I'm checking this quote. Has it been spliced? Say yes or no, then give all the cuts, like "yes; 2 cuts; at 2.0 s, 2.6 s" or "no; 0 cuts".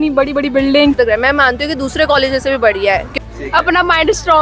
yes; 2 cuts; at 1.0 s, 3.1 s